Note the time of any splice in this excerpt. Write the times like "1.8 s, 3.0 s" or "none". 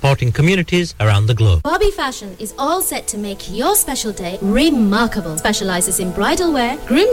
1.6 s